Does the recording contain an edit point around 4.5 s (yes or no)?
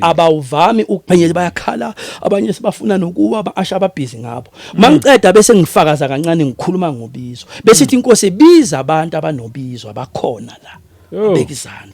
no